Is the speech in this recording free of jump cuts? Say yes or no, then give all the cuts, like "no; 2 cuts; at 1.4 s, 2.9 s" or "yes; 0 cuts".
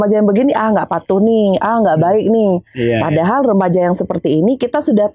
yes; 0 cuts